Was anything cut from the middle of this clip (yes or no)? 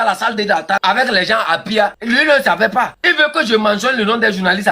yes